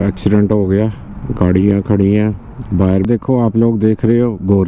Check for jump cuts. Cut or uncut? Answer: cut